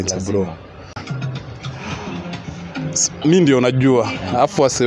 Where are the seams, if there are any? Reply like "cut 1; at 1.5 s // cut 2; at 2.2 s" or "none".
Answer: cut 1; at 1.1 s